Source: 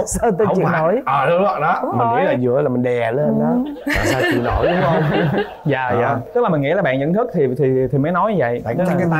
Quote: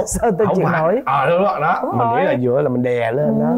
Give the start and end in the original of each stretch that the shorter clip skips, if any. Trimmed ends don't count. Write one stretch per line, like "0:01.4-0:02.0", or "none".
none